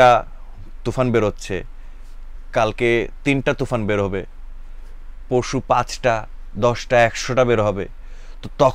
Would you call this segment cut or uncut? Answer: uncut